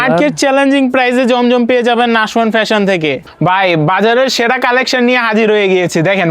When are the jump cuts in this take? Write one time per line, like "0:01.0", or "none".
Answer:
0:03.3